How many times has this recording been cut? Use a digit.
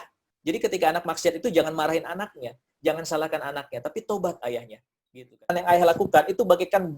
1